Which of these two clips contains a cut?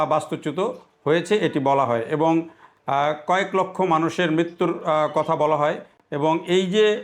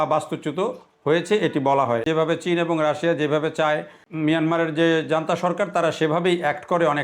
second; 2 cuts; at 2.0 s, 4.0 s

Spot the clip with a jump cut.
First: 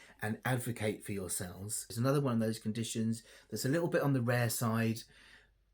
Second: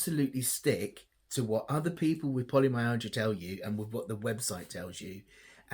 first; 1 cut; at 1.9 s

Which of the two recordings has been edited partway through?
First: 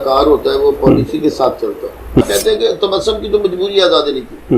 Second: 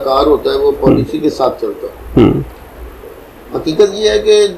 first; 1 cut; at 2.2 s

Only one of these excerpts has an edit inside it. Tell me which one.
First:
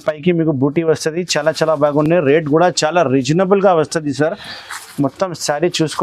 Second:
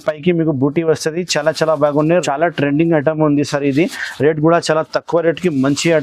second; 1 cut; at 2.1 s

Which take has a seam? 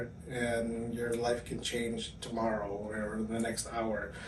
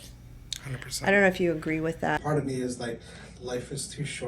second; 1 cut; at 2.2 s

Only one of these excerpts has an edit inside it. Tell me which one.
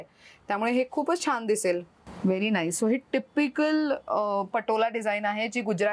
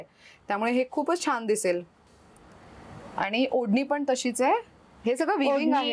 first; 1 cut; at 2.0 s

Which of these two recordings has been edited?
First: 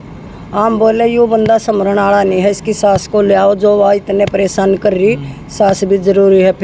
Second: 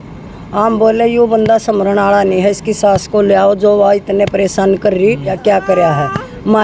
second; 1 cut; at 5.3 s

